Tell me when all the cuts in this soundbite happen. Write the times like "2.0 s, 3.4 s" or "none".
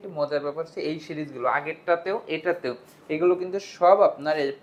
none